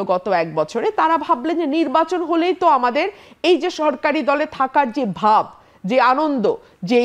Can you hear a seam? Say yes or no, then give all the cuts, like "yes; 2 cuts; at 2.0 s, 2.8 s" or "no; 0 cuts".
no; 0 cuts